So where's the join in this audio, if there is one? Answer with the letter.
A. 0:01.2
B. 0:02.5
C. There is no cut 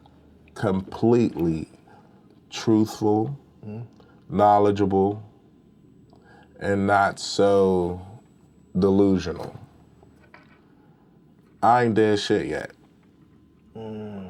C